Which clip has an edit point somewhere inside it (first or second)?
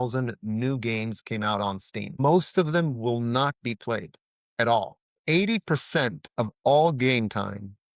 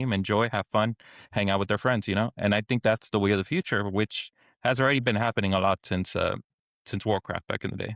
first